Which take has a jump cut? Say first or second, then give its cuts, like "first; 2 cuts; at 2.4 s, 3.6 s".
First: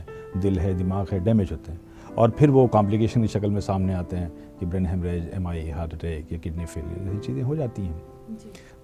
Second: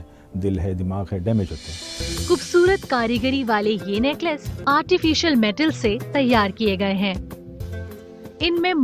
second; 3 cuts; at 2.0 s, 4.6 s, 7.5 s